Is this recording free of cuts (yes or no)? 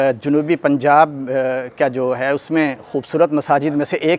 yes